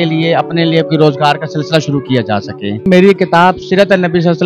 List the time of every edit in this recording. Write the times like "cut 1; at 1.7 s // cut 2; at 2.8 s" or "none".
cut 1; at 2.9 s